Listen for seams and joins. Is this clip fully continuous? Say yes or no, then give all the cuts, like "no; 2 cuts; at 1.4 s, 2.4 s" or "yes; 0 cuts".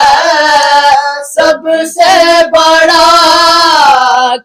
yes; 0 cuts